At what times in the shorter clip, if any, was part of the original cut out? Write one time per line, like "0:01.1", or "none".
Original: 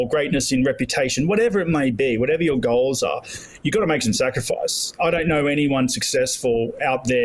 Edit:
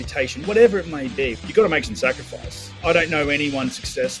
0:01.3